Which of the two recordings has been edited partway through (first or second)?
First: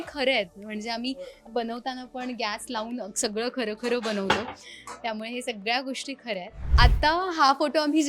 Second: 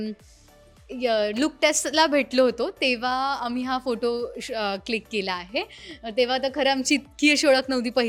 first